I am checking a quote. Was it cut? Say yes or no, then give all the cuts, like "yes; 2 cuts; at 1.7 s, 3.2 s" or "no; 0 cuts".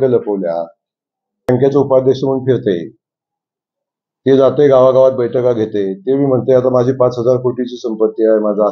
yes; 1 cut; at 1.5 s